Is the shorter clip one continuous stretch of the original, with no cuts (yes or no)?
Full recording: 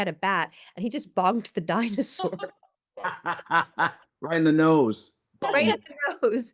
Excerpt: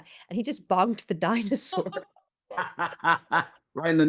yes